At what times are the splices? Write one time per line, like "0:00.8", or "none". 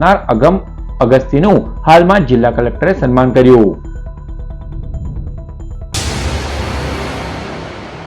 0:06.0